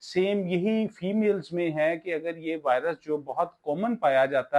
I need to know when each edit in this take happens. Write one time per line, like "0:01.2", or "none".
none

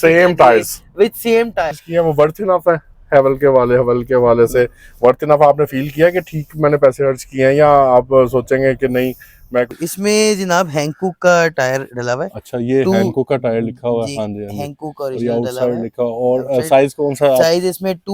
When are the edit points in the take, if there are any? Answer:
0:01.8
0:09.7

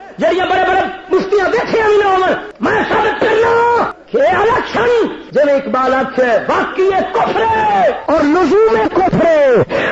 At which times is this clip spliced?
0:02.5
0:04.0
0:05.2
0:08.0

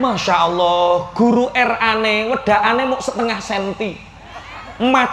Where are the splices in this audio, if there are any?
none

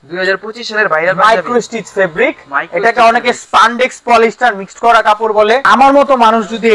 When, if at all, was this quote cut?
0:05.6

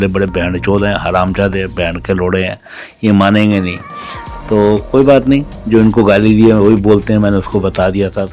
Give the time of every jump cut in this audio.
none

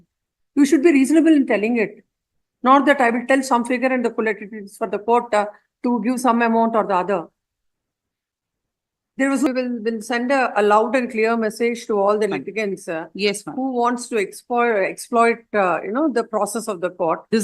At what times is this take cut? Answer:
0:09.5

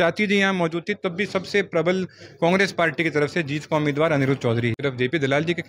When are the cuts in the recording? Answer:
0:04.8

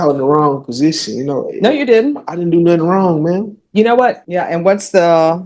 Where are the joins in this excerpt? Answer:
0:04.2

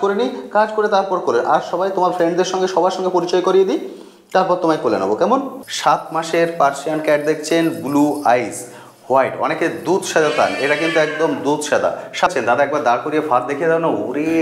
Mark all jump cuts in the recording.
0:05.6
0:12.3

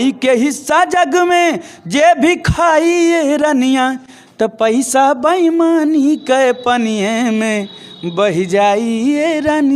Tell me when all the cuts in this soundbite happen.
none

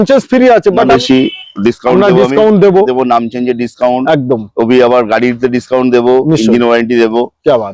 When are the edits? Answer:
0:00.9

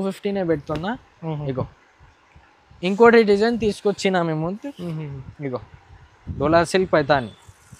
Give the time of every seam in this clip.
0:06.2

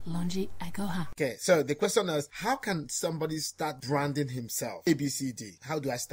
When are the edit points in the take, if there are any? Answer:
0:04.8

